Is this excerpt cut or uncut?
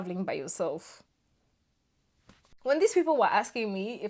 cut